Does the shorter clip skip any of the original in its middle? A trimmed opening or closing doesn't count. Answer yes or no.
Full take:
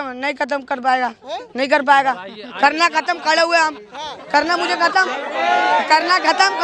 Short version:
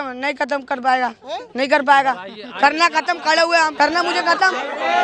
yes